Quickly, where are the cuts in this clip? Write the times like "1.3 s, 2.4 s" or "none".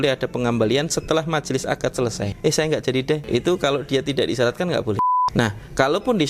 2.3 s, 3.2 s, 5.1 s

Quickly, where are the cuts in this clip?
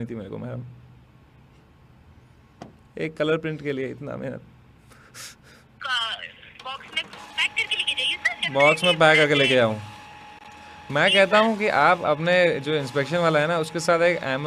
5.8 s

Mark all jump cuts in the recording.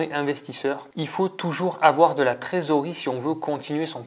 0.9 s

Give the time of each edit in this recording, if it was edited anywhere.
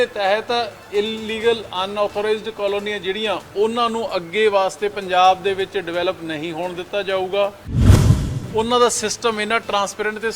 8.0 s

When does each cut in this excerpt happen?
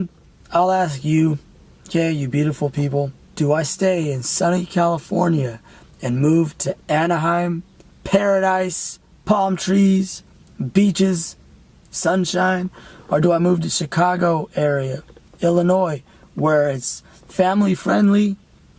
none

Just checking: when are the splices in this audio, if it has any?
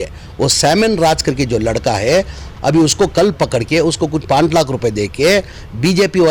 2.4 s

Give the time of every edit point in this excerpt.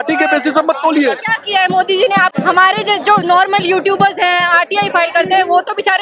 1.3 s, 2.3 s

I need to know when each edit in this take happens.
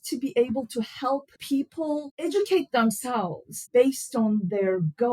1.6 s, 3.6 s

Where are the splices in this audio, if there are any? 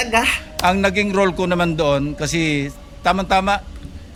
none

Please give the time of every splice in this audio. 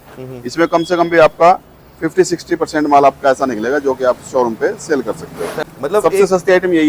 5.6 s

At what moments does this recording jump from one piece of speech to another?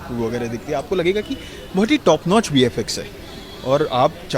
none

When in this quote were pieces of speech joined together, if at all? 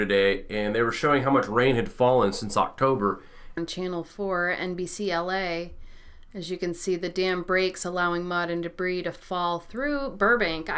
none

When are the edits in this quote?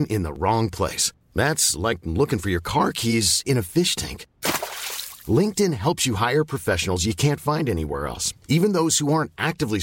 none

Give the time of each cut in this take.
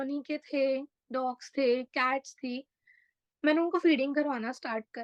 none

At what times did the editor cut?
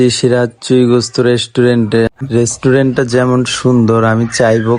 2.2 s

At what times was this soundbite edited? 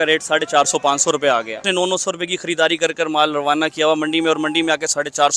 1.6 s

